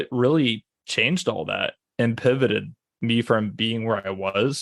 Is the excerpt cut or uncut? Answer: cut